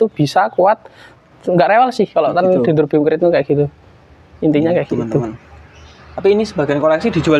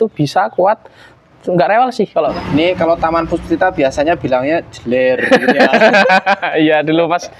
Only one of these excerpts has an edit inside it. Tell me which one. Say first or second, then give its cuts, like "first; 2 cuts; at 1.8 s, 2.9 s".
second; 1 cut; at 2.3 s